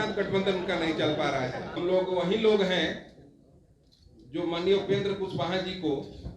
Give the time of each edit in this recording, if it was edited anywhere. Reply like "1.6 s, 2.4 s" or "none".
1.7 s